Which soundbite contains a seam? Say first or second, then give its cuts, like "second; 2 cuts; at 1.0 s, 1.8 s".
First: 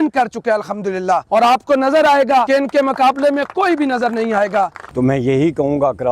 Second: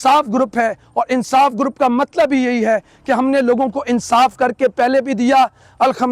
first; 3 cuts; at 1.2 s, 2.5 s, 4.8 s